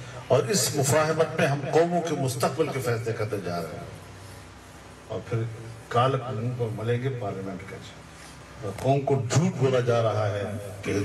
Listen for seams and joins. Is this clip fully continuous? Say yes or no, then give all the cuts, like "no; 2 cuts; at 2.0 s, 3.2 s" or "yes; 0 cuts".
yes; 0 cuts